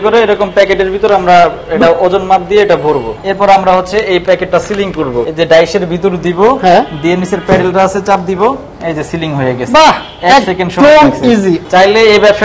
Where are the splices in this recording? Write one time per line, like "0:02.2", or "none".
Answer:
0:03.2
0:05.2
0:11.6